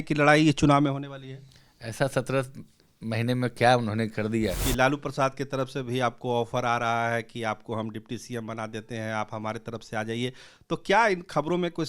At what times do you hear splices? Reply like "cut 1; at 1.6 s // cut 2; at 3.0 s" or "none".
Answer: cut 1; at 4.6 s

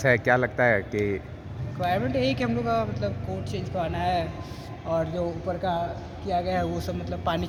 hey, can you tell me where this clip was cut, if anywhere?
none

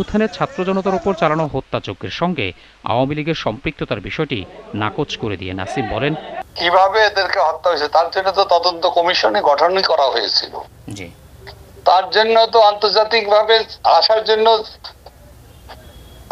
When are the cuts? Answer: none

